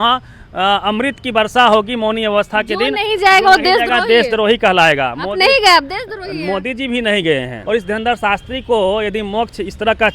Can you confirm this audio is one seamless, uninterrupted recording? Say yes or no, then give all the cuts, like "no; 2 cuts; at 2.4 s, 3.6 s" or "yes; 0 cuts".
no; 1 cut; at 7.5 s